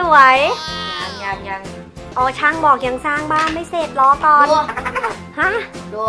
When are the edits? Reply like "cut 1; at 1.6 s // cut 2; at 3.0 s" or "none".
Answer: none